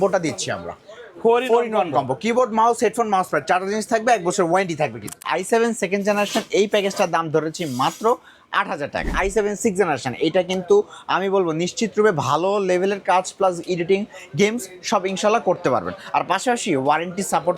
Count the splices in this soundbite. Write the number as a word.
two